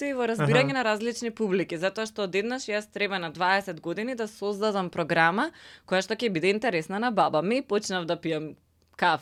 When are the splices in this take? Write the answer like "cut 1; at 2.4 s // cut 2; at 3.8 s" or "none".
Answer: none

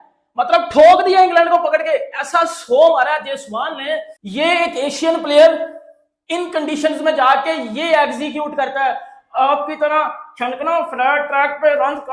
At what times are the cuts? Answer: cut 1; at 4.2 s

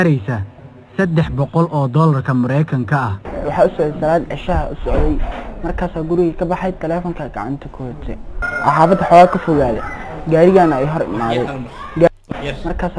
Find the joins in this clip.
cut 1; at 12.1 s

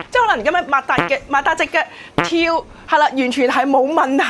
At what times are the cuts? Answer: none

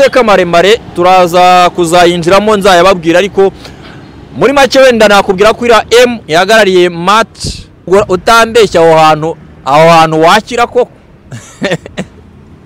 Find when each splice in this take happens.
cut 1; at 7.9 s

